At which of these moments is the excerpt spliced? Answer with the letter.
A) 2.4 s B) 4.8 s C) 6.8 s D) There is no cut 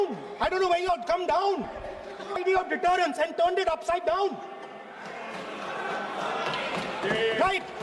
A